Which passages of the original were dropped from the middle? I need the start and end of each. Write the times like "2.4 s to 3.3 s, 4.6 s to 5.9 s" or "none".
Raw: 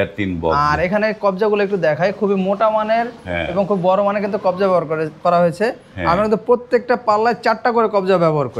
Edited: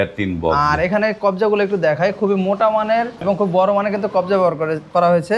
3.2 s to 3.5 s